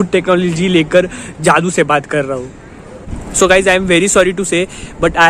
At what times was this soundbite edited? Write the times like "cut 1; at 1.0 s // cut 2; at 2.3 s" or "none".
cut 1; at 3.1 s